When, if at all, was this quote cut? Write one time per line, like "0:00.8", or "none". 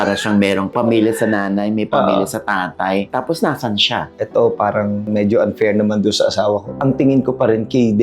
0:04.1
0:06.7